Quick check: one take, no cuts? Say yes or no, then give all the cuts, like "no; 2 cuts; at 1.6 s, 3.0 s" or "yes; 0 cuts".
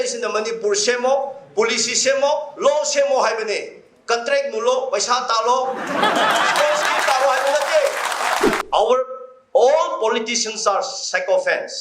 no; 1 cut; at 8.6 s